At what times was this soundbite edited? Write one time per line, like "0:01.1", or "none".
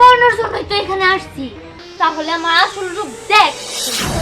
0:01.8